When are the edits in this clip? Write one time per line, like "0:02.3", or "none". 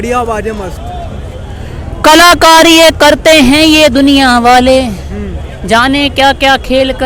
none